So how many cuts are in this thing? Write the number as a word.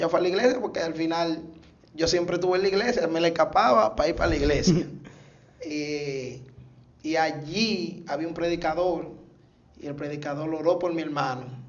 zero